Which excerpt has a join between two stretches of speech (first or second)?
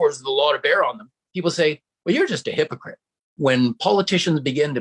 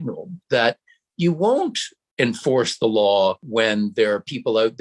first